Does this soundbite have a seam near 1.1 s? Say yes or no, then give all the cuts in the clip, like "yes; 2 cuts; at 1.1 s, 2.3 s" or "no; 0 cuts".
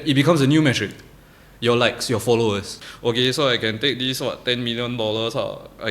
no; 1 cut; at 2.7 s